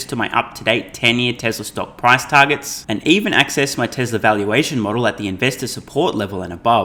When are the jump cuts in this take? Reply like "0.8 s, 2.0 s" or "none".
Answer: none